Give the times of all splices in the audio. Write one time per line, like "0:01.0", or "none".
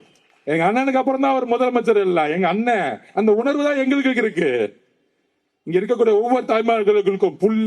none